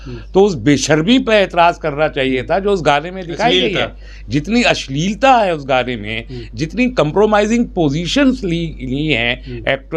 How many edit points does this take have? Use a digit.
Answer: 0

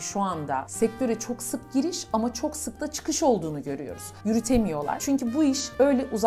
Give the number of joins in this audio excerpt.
1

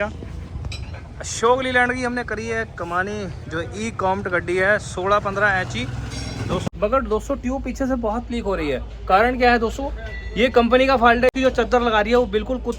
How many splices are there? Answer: 2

